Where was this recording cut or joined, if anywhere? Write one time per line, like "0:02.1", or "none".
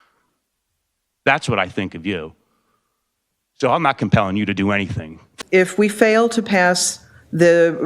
0:05.3